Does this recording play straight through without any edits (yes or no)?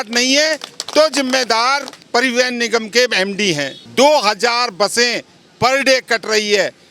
no